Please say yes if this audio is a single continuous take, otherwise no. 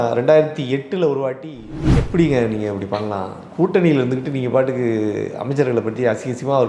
no